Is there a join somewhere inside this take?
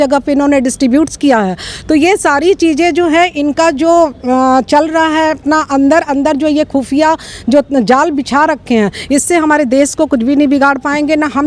no; 0 cuts

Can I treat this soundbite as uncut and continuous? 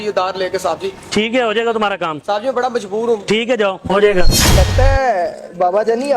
no; 1 cut; at 4.4 s

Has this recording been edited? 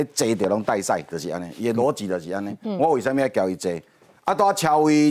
no; 0 cuts

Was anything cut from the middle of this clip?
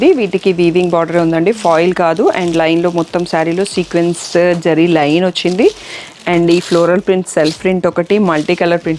no; 0 cuts

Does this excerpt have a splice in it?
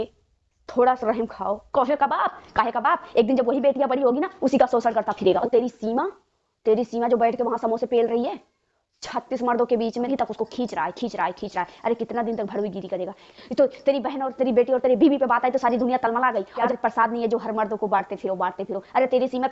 yes; 5 cuts; at 1.6 s, 5.4 s, 10.1 s, 13.2 s, 16.7 s

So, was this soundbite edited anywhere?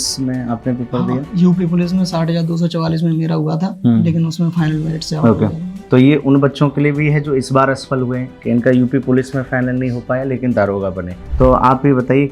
yes; 1 cut; at 11.2 s

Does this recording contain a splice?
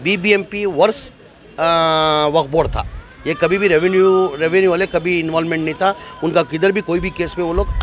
no; 0 cuts

